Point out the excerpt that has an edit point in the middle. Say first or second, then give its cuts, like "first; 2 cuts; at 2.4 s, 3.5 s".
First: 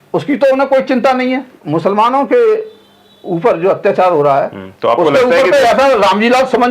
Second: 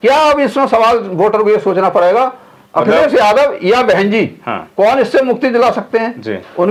first; 1 cut; at 1.6 s